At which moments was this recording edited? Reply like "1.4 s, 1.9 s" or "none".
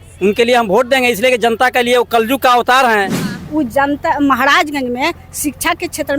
3.3 s

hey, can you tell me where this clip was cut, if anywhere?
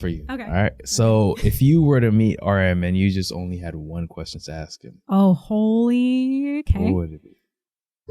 none

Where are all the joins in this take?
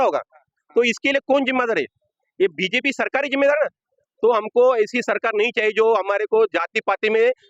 none

